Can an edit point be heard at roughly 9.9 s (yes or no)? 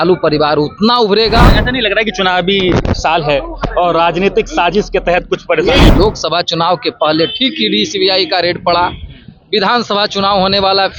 no